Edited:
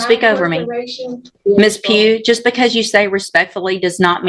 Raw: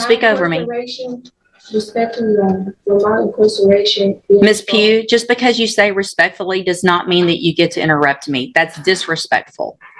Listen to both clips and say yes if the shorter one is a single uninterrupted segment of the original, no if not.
no